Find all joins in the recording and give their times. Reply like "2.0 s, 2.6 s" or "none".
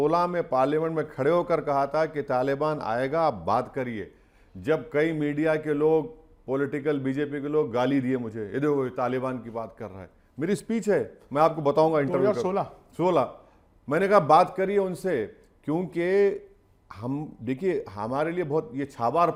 none